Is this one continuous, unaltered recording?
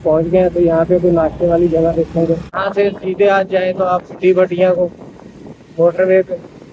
no; 1 cut; at 2.6 s

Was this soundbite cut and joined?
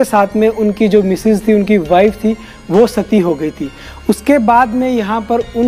no; 0 cuts

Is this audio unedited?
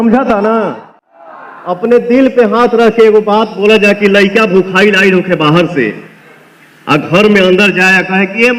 yes; 0 cuts

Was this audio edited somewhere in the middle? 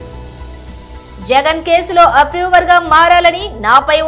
no; 0 cuts

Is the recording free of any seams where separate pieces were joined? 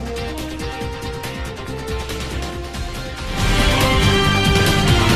yes; 0 cuts

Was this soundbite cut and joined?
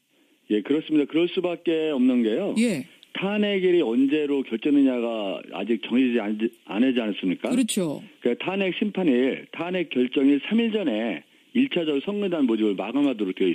no; 0 cuts

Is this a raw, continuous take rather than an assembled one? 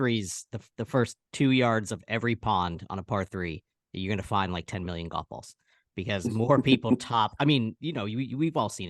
yes; 0 cuts

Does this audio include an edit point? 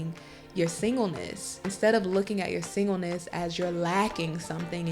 yes; 1 cut; at 1.7 s

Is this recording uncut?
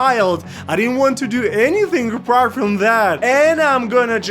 no; 1 cut; at 3.2 s

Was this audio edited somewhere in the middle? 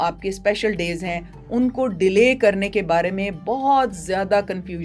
no; 0 cuts

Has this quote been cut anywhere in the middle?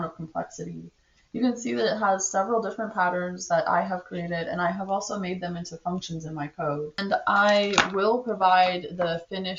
yes; 1 cut; at 7.0 s

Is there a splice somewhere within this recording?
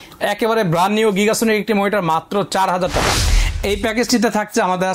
yes; 1 cut; at 3.2 s

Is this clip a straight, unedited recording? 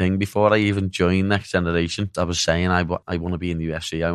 no; 2 cuts; at 2.1 s, 3.0 s

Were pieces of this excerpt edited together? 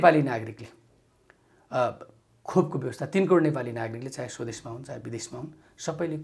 no; 0 cuts

